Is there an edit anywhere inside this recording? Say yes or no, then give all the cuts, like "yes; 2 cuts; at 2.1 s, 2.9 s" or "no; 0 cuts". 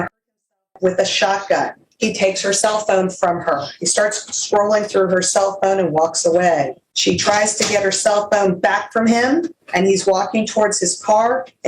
yes; 3 cuts; at 1.8 s, 6.8 s, 9.6 s